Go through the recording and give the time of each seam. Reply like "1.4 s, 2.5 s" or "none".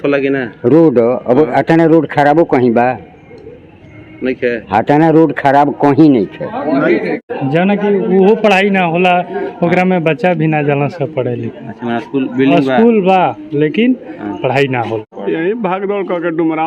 7.2 s, 15.1 s